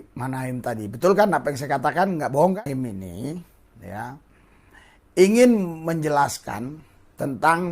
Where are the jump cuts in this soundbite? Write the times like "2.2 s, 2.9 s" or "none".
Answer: 2.6 s